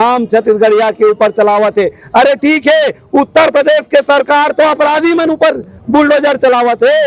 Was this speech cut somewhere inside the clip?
no; 0 cuts

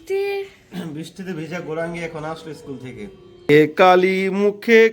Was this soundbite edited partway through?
yes; 1 cut; at 3.5 s

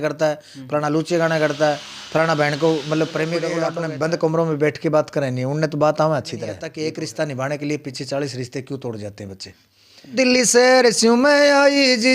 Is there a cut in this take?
yes; 3 cuts; at 3.7 s, 6.7 s, 10.2 s

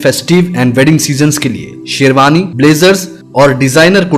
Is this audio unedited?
yes; 0 cuts

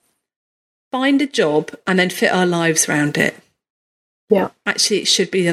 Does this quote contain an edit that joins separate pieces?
no; 0 cuts

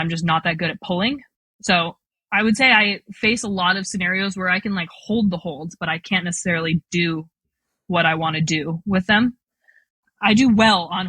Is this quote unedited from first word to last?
no; 1 cut; at 9.8 s

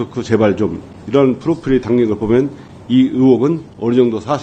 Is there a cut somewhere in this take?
no; 0 cuts

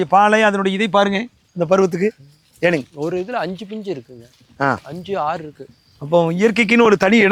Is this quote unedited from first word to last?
yes; 0 cuts

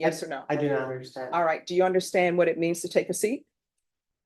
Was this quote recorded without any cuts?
yes; 0 cuts

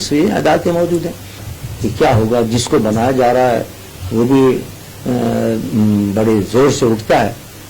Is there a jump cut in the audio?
yes; 1 cut; at 1.5 s

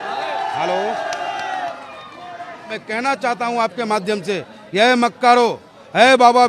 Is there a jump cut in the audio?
yes; 1 cut; at 2.8 s

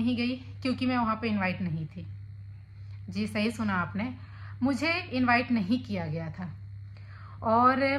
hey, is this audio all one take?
yes; 0 cuts

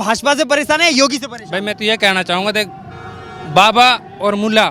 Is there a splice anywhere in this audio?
no; 0 cuts

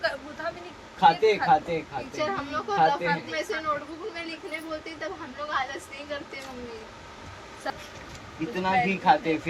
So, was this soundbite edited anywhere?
yes; 1 cut; at 7.7 s

